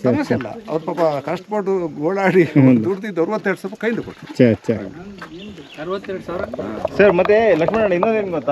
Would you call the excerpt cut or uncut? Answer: uncut